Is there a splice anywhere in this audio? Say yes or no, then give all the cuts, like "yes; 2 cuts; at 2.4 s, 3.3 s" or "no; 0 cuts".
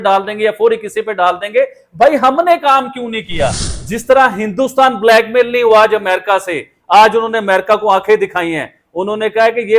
yes; 1 cut; at 3.7 s